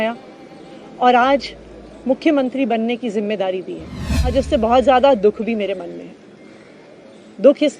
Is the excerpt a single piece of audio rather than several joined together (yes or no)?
no